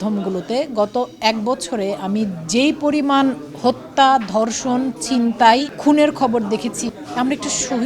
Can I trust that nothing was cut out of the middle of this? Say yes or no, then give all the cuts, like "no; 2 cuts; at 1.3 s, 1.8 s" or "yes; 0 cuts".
no; 2 cuts; at 5.7 s, 6.8 s